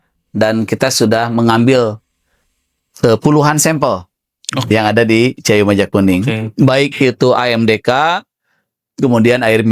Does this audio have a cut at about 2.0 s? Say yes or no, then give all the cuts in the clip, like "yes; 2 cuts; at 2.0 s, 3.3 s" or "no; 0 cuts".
no; 0 cuts